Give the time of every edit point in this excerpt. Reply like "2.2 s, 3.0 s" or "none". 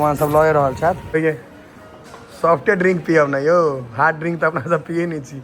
1.0 s